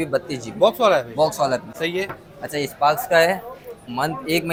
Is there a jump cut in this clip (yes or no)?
no